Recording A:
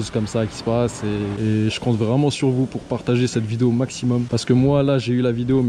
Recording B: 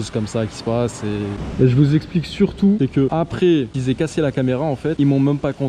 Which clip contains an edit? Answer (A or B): A